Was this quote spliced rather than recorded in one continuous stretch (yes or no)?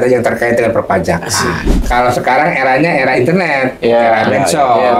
yes